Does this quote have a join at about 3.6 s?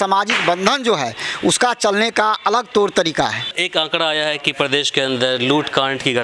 yes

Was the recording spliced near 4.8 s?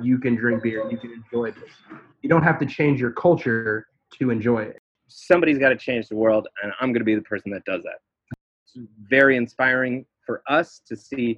yes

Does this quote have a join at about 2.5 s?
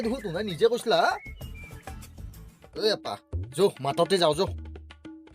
yes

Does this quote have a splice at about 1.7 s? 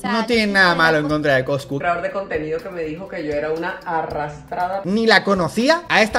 yes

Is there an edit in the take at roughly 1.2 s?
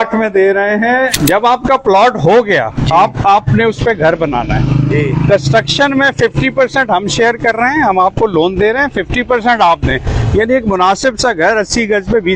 yes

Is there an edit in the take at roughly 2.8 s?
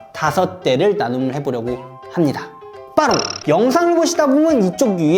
yes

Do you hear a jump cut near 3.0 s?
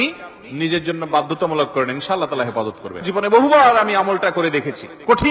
yes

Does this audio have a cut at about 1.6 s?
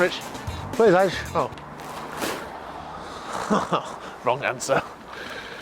no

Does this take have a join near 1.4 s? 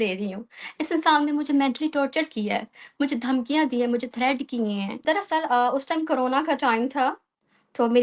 no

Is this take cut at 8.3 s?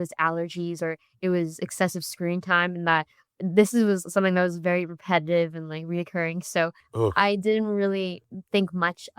yes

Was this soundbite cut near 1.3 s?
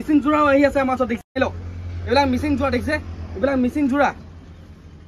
yes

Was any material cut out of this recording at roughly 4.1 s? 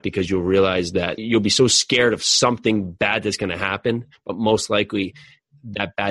no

